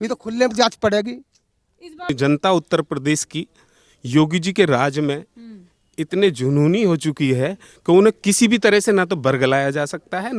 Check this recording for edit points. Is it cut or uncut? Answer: cut